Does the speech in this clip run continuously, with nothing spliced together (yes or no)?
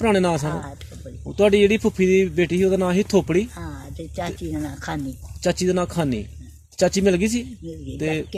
yes